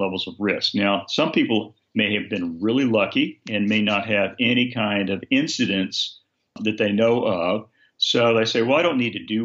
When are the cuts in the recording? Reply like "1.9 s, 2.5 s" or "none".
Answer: none